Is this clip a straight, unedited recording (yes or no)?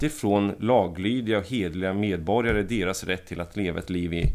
yes